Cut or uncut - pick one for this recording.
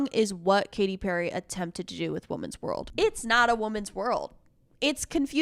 uncut